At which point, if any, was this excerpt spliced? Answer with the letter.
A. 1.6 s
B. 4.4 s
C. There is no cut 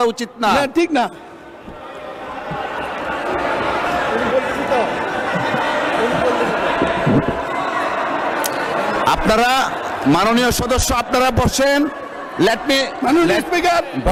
C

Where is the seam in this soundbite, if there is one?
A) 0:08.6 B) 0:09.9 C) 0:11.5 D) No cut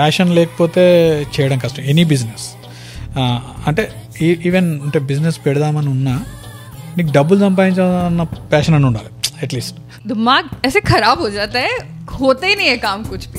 B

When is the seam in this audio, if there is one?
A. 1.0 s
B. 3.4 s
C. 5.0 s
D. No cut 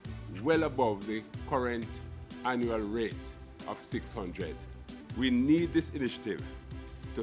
C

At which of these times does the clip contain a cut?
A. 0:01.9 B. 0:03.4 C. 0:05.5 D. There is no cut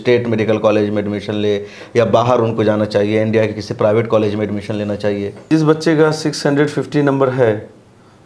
C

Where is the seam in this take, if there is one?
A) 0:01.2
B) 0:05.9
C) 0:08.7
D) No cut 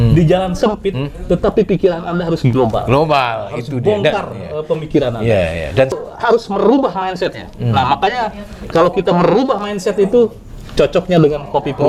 B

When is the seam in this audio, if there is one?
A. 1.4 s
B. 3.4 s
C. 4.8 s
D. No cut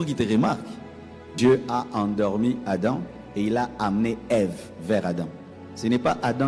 A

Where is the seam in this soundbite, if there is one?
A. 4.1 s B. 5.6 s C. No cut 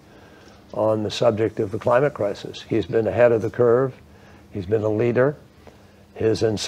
C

